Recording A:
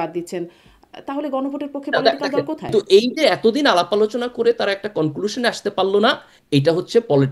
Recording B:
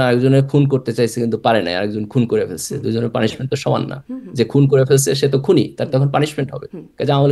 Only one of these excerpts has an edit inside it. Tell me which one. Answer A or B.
A